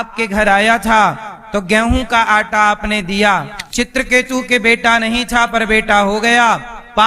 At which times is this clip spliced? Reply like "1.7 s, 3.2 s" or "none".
3.6 s